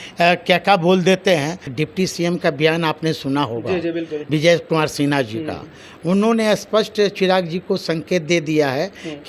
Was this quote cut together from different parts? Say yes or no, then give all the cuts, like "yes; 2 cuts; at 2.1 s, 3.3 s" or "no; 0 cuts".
yes; 2 cuts; at 1.7 s, 4.1 s